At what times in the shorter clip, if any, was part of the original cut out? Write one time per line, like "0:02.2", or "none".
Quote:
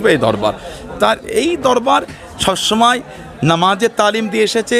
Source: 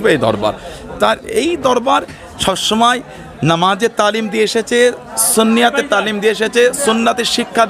none